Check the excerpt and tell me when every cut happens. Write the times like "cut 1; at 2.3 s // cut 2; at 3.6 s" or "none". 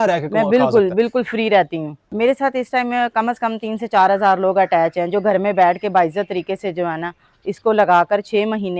cut 1; at 2.0 s